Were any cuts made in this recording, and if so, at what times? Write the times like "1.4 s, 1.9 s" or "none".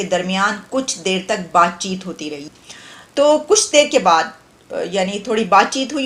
none